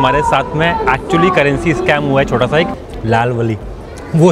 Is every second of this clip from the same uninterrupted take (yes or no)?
no